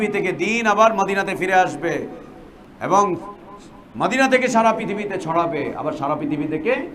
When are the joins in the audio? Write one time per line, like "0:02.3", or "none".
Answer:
none